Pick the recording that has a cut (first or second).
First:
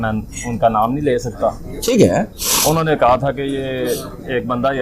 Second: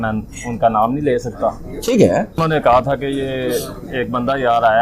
second